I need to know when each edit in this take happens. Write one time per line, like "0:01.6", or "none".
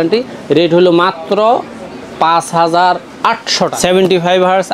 0:03.7